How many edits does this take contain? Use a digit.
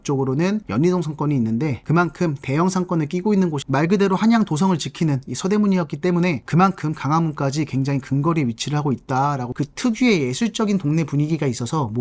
2